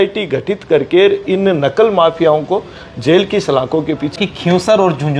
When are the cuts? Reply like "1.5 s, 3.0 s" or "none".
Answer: 4.2 s

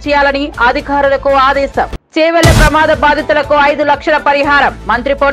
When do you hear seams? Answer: 2.0 s

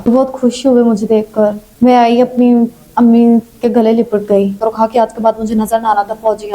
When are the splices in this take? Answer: 4.7 s

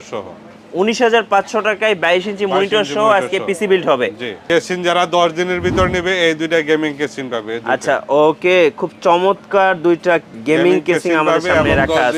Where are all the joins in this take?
4.4 s

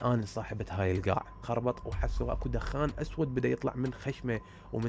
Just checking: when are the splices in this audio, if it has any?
1.4 s

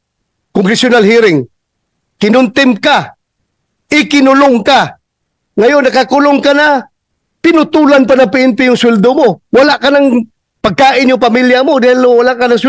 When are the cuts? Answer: none

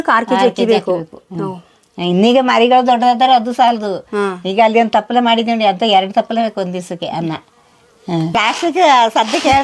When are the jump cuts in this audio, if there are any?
8.3 s

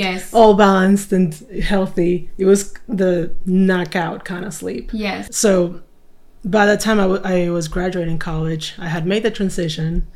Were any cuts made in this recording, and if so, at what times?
5.3 s

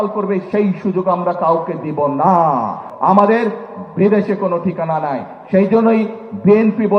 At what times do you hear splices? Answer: 2.8 s

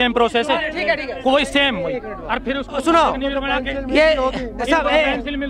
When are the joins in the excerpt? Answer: none

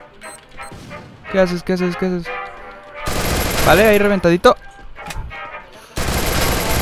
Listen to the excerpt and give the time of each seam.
none

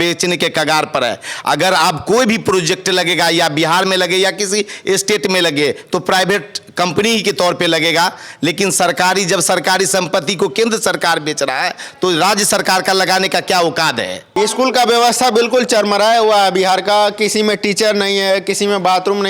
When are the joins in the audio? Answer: 14.2 s

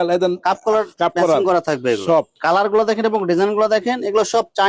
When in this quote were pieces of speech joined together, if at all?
2.3 s

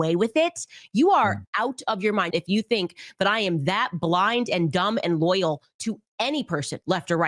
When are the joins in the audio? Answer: 2.3 s

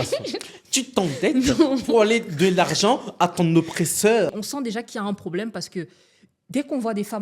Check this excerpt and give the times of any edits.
4.3 s

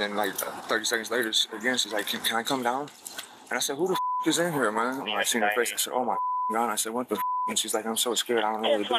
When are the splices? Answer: 5.0 s

